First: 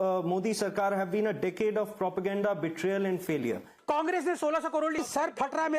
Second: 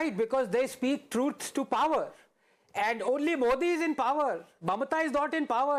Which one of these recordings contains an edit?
first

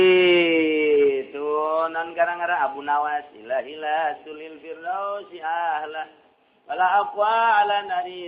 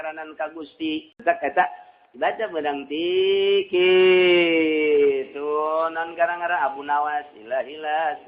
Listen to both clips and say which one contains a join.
second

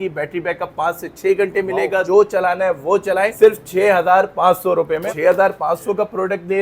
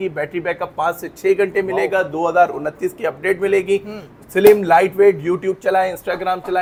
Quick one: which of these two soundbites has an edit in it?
first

